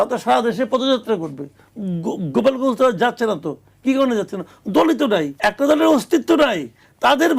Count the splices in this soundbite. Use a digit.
1